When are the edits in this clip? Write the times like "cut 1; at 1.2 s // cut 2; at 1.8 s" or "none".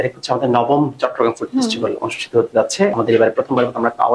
cut 1; at 2.9 s